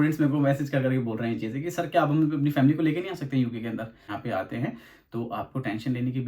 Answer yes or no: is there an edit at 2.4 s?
no